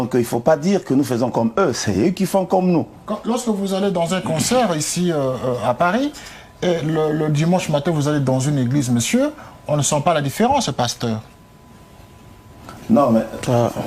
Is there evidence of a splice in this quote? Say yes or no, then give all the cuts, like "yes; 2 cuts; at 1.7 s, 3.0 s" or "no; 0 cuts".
no; 0 cuts